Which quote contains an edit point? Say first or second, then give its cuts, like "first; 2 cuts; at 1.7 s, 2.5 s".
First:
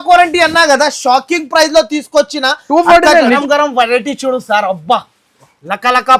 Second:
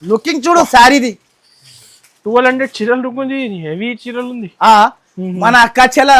first; 1 cut; at 3.4 s